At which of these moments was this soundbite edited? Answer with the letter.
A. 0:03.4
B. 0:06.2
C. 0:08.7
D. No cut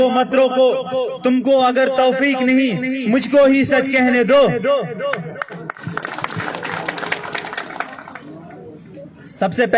D